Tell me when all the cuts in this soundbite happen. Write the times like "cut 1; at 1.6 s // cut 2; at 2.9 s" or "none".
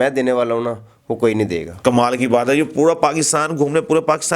none